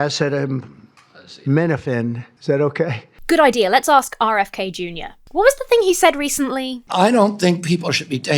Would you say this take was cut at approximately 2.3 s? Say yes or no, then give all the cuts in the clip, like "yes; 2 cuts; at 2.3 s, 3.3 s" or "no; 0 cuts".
yes; 2 cuts; at 2.3 s, 3.1 s